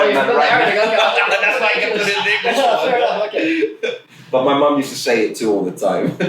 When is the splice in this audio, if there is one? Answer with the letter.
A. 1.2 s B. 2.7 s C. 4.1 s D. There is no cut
D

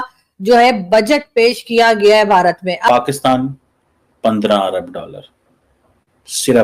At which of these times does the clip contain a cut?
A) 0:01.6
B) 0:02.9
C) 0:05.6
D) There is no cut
B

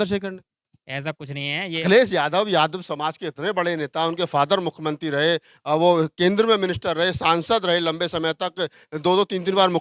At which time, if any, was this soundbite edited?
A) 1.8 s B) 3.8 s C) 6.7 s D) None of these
A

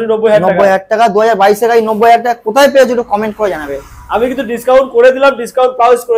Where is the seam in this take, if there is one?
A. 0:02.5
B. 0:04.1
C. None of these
C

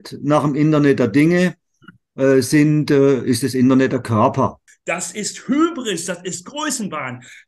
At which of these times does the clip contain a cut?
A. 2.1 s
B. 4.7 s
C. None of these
B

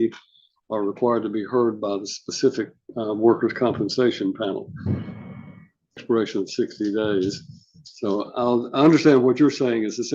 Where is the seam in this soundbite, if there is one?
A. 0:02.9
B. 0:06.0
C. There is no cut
B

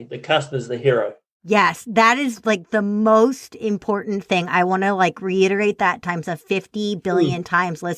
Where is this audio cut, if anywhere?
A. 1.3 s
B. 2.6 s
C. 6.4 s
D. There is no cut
A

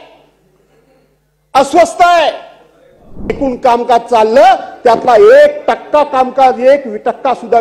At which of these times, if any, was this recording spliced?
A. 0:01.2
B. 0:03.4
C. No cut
B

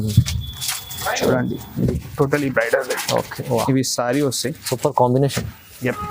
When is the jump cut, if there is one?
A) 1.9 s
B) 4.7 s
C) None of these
A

